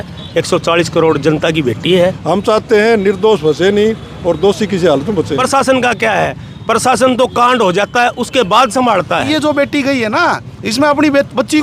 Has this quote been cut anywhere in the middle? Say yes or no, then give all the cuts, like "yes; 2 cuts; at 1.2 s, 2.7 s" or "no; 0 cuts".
yes; 3 cuts; at 2.2 s, 5.3 s, 9.3 s